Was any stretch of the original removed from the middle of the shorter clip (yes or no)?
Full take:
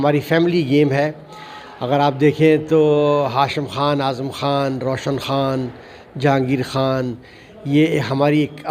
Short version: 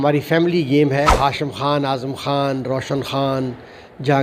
yes